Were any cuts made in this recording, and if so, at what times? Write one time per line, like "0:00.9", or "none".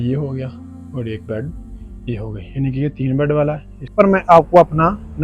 0:03.9